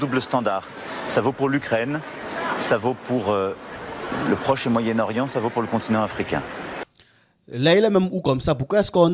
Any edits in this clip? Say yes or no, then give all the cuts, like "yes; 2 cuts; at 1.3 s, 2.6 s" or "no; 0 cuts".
no; 0 cuts